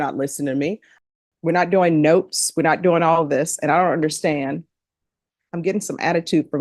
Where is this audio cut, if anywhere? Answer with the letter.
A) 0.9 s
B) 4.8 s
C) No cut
A